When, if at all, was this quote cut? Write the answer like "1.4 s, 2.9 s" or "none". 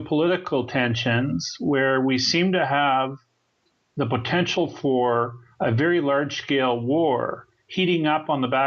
6.2 s